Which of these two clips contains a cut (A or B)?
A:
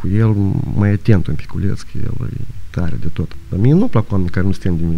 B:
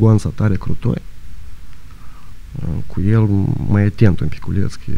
A